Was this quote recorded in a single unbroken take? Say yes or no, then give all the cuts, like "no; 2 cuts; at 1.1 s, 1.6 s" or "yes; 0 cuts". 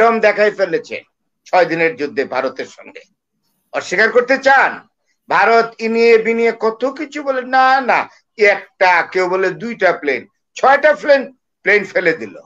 yes; 0 cuts